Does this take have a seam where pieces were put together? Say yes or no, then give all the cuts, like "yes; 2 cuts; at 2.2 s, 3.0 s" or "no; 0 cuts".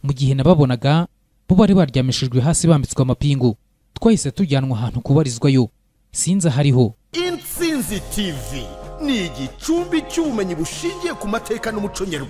yes; 1 cut; at 7.0 s